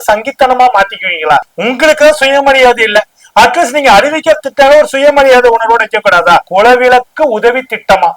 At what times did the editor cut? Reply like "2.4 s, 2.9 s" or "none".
1.5 s, 6.5 s